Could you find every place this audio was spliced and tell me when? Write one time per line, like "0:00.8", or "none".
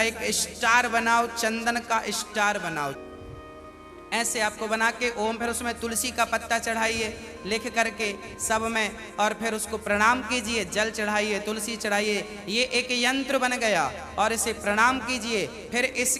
0:03.0